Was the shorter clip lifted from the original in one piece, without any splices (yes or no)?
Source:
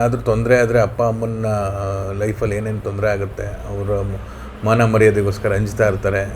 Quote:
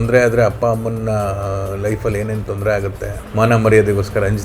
no